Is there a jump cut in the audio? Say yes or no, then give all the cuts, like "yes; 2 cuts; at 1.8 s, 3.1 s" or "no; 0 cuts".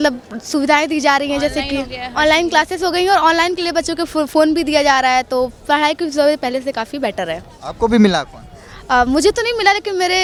no; 0 cuts